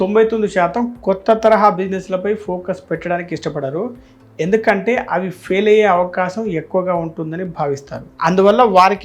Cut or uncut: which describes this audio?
uncut